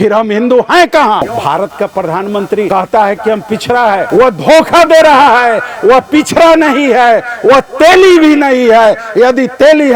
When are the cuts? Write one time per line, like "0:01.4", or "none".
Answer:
0:01.3
0:02.7
0:04.1